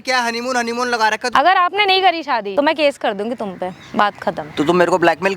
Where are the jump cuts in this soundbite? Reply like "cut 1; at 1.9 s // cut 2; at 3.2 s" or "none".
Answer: cut 1; at 1.3 s // cut 2; at 2.5 s // cut 3; at 4.5 s